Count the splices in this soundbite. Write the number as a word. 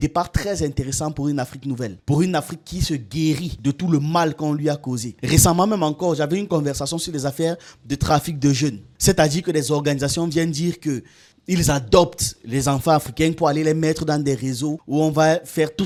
zero